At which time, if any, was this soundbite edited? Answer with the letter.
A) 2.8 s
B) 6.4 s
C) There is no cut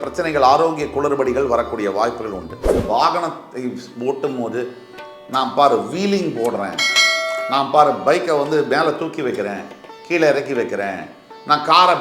A